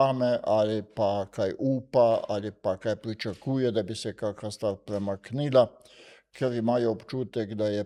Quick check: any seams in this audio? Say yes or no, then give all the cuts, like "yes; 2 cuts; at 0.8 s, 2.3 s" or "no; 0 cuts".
no; 0 cuts